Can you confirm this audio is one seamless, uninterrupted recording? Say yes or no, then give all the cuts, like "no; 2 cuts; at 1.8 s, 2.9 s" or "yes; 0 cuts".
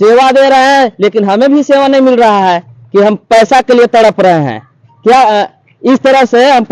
yes; 0 cuts